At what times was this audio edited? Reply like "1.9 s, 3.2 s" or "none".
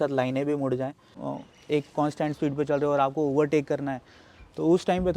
1.2 s